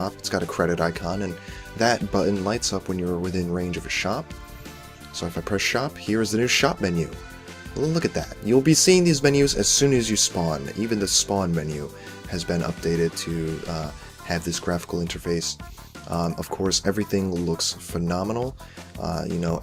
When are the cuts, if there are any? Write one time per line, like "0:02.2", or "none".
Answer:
none